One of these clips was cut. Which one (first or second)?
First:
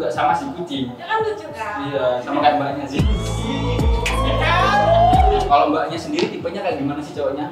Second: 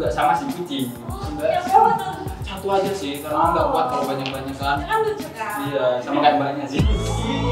first